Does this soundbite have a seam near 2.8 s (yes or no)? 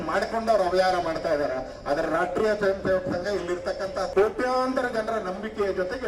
no